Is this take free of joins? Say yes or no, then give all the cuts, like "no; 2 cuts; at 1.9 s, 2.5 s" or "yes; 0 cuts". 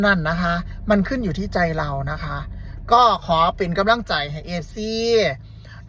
yes; 0 cuts